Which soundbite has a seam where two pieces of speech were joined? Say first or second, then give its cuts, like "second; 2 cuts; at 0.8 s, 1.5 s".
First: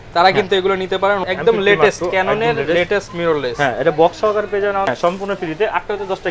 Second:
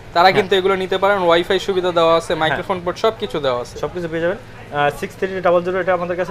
first; 2 cuts; at 1.2 s, 4.9 s